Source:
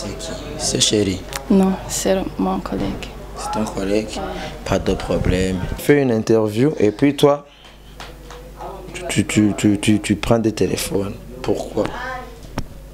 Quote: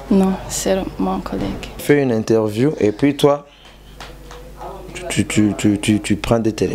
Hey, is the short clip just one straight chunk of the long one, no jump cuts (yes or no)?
no